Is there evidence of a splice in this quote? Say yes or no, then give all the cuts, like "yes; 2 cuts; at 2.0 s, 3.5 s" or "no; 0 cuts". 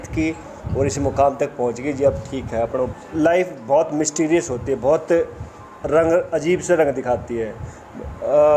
yes; 1 cut; at 2.9 s